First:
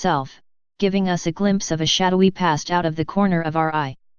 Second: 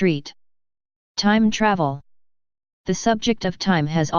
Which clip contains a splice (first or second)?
second